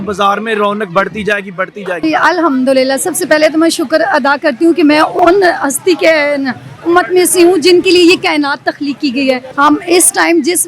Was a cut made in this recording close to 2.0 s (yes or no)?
yes